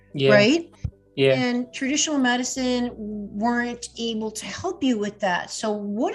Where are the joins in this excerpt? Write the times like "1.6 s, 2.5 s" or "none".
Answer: none